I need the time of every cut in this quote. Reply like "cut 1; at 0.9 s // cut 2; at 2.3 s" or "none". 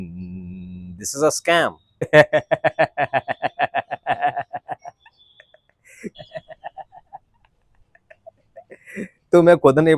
cut 1; at 2.1 s // cut 2; at 6.1 s